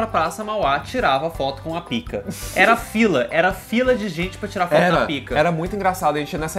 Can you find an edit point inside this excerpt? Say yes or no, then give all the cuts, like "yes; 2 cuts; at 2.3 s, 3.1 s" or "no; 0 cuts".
no; 0 cuts